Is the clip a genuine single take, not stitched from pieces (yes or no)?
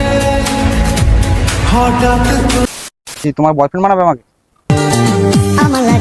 no